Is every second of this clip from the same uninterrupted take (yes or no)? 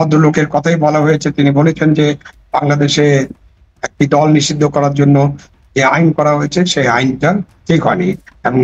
yes